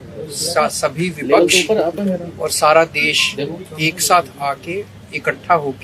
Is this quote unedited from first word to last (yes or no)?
yes